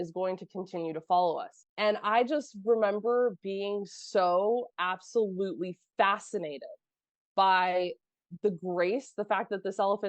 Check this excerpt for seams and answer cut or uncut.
cut